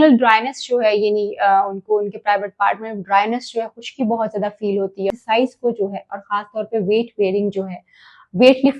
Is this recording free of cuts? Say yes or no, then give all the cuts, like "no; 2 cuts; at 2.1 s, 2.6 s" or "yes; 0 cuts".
no; 1 cut; at 5.1 s